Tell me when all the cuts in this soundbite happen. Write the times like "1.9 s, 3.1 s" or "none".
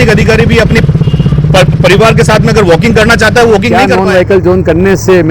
4.2 s